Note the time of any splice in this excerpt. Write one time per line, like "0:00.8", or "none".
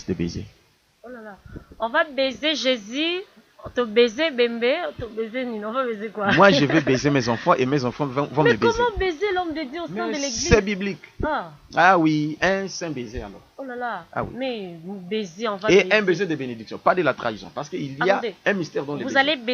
none